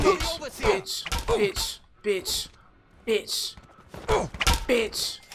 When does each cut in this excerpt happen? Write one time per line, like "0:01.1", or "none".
none